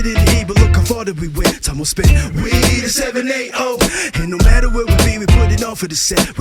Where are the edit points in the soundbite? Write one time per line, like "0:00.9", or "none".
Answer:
none

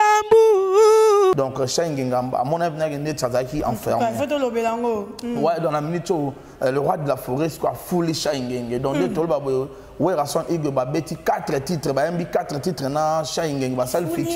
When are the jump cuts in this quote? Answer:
0:01.4

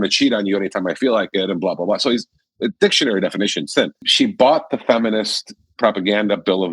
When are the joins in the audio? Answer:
0:04.1

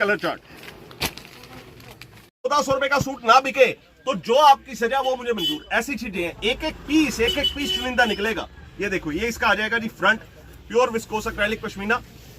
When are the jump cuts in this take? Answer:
0:02.5

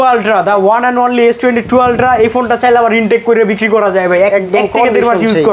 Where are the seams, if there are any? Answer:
none

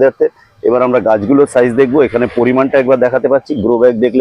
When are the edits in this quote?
none

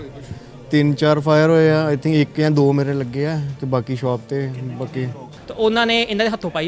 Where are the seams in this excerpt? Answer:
0:05.4

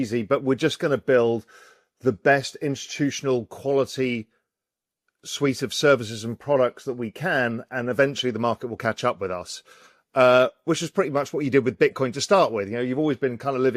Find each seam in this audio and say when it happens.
none

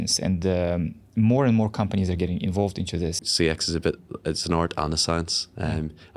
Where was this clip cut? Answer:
0:03.2

